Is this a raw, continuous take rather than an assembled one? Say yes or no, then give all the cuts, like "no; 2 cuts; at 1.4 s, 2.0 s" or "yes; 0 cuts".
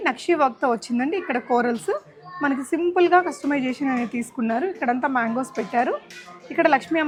yes; 0 cuts